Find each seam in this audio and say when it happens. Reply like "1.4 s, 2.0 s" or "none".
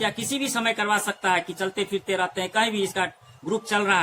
none